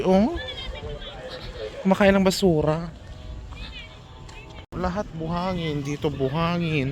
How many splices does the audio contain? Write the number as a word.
one